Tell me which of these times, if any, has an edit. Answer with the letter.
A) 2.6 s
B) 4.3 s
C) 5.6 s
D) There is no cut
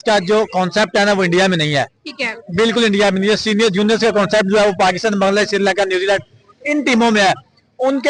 D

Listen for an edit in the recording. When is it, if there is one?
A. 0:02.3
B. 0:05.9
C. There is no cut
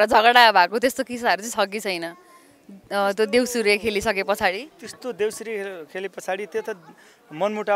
C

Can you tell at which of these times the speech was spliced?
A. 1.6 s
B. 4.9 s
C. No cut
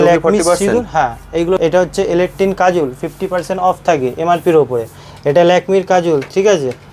A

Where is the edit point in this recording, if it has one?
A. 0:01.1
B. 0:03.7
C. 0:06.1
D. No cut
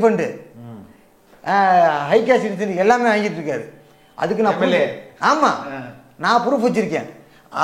D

